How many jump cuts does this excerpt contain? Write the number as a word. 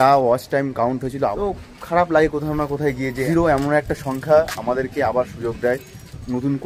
two